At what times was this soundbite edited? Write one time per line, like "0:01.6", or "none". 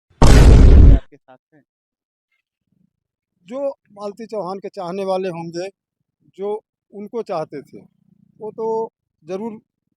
0:01.0